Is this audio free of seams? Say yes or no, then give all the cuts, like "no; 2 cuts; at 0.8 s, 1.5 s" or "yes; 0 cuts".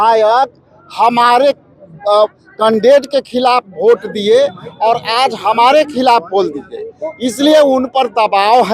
yes; 0 cuts